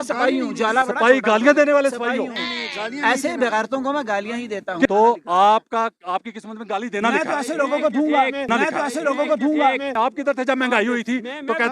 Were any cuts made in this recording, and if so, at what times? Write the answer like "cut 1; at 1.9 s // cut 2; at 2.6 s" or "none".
cut 1; at 2.2 s // cut 2; at 4.9 s // cut 3; at 9.7 s